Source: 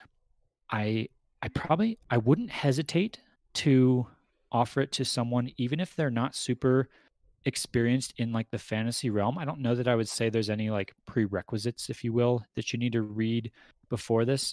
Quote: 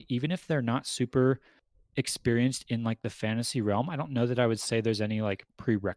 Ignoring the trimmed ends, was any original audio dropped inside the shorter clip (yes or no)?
no